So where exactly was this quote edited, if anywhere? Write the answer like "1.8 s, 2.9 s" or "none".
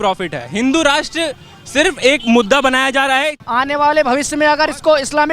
3.4 s